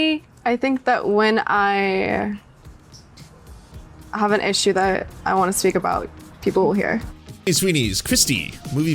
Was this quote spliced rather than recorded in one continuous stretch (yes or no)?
yes